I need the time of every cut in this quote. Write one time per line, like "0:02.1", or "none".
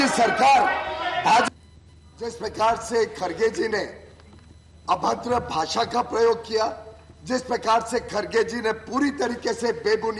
0:01.5